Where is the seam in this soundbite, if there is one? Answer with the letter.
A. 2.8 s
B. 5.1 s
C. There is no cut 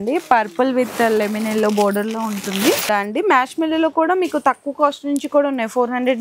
A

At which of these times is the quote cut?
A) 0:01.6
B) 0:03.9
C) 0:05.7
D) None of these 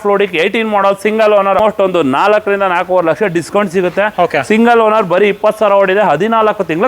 A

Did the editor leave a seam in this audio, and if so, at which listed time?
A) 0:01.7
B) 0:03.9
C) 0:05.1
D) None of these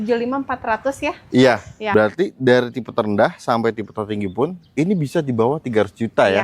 A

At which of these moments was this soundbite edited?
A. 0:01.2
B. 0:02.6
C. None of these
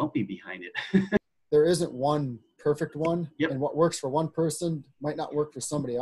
A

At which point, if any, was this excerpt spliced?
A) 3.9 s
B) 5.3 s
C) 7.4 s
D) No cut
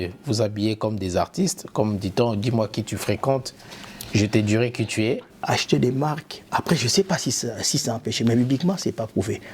B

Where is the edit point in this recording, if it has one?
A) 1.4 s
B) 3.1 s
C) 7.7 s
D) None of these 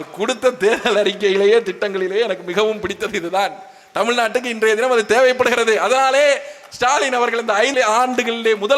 C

